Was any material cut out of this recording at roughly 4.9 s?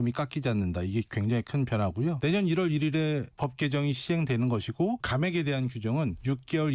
no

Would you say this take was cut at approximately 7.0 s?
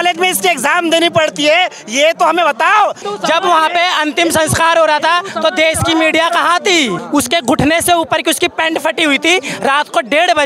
yes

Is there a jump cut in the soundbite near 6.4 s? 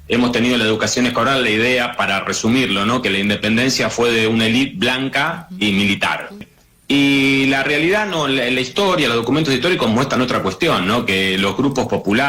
yes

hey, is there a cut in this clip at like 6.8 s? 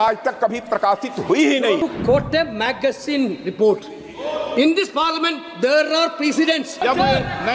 yes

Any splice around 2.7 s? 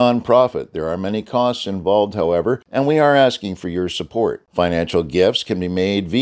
yes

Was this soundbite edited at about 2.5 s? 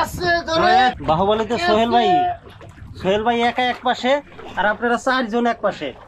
no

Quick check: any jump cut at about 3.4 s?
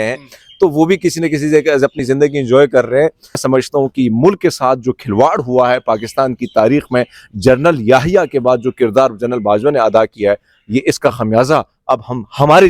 yes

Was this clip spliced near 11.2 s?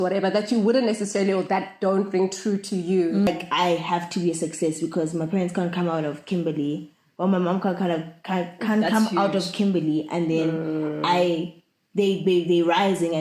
no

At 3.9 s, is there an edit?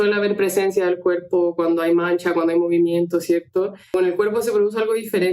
yes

